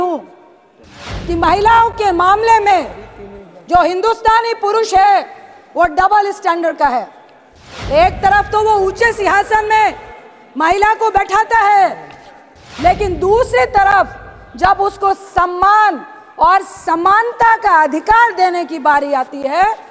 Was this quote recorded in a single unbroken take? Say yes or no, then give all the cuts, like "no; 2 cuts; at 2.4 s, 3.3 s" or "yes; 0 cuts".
yes; 0 cuts